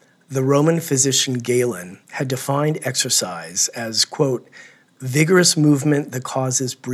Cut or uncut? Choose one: uncut